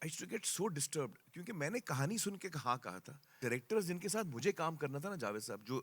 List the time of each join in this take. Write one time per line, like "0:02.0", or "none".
0:03.4

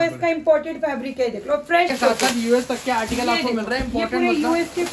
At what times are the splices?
0:01.9

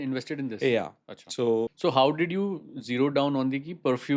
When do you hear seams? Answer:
0:01.7

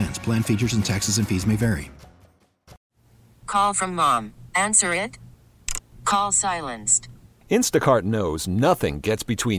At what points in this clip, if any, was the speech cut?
0:02.7

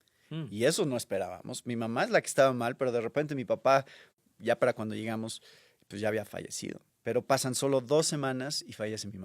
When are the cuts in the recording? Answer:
0:04.1
0:06.9

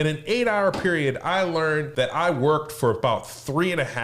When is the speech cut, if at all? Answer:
0:01.9

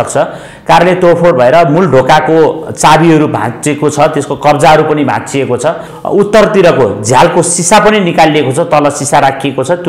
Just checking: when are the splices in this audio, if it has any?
0:05.9

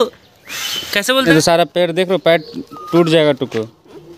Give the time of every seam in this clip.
0:01.3

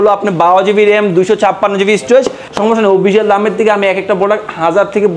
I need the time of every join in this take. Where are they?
0:02.4

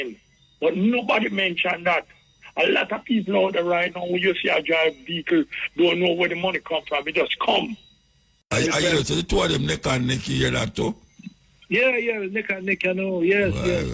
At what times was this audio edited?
0:08.5

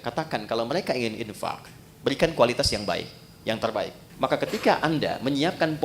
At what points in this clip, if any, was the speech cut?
0:04.0

